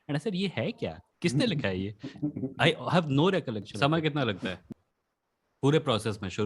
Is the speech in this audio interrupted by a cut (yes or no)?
yes